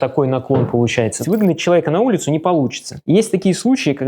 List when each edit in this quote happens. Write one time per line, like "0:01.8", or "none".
0:01.2